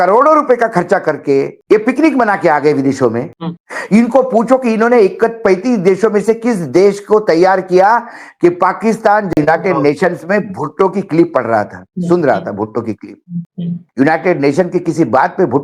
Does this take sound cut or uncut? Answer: cut